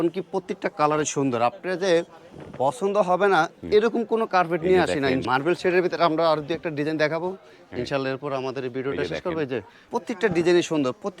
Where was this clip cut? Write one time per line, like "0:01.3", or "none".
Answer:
0:05.2
0:09.9